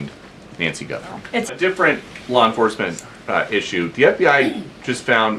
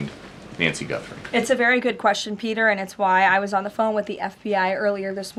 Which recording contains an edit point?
first; 1 cut; at 1.5 s

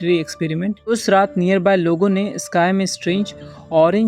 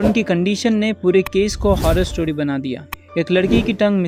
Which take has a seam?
first; 1 cut; at 0.9 s

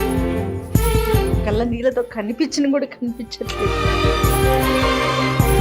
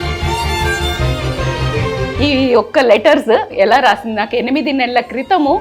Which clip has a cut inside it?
second; 2 cuts; at 1.9 s, 3.5 s

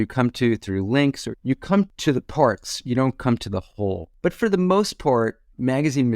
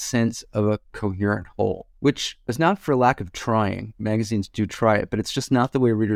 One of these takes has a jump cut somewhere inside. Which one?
first; 2 cuts; at 1.9 s, 4.1 s

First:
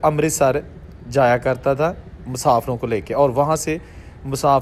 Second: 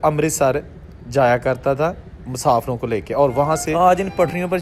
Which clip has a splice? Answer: second; 1 cut; at 3.7 s

